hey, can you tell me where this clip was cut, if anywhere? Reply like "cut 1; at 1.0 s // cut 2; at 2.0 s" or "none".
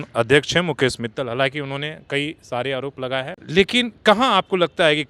cut 1; at 3.4 s